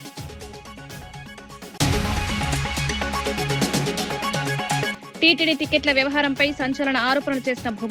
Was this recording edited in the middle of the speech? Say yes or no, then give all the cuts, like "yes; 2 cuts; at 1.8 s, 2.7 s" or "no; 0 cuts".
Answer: yes; 3 cuts; at 1.8 s, 3.3 s, 5.0 s